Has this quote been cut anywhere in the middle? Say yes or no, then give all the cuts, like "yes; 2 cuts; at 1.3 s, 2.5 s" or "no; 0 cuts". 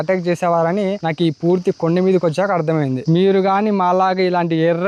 no; 0 cuts